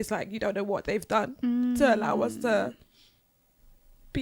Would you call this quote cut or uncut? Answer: uncut